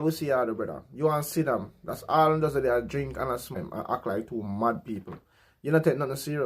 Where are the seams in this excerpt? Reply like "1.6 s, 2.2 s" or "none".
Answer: 3.6 s